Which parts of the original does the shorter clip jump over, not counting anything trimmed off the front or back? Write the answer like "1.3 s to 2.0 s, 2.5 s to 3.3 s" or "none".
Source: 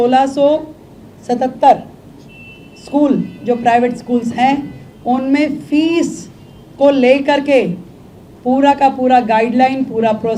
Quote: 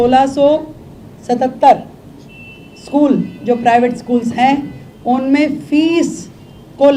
none